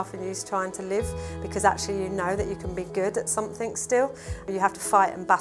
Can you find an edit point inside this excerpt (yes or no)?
yes